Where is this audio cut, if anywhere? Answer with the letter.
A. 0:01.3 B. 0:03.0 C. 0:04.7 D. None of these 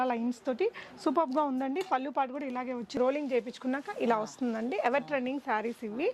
B